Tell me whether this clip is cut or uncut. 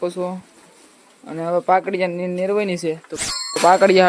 cut